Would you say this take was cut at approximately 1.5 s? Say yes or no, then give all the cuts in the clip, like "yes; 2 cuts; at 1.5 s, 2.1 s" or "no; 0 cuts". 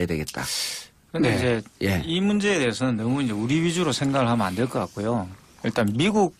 no; 1 cut; at 3.0 s